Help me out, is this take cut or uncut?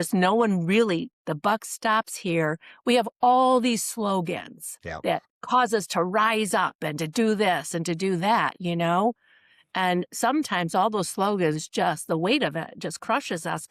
uncut